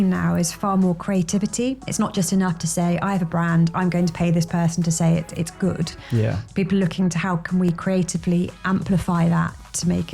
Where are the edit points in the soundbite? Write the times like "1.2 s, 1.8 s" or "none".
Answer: none